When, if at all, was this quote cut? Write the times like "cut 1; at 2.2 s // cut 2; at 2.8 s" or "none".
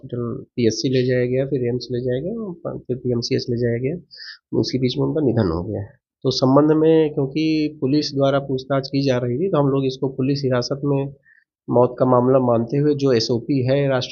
none